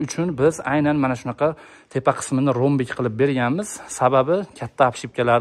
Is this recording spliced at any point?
no; 0 cuts

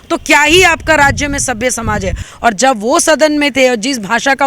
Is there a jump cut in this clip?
yes; 1 cut; at 2.2 s

